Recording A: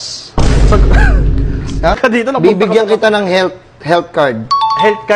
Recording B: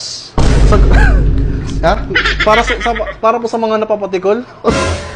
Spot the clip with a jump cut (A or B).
A